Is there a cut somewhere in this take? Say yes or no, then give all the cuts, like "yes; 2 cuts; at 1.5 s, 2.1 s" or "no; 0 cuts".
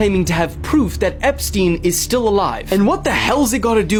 no; 0 cuts